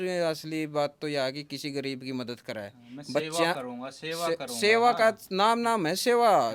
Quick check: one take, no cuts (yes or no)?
yes